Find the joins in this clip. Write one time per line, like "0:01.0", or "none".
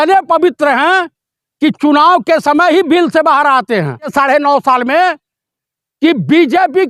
0:04.1